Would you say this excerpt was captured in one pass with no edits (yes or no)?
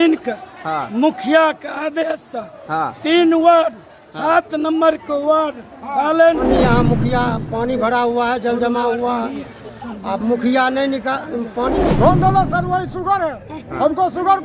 no